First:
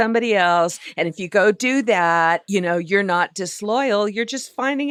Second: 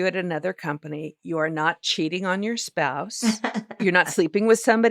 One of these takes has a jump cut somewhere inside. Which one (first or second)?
second